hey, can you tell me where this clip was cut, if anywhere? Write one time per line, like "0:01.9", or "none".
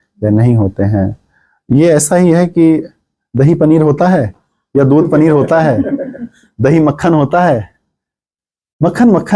none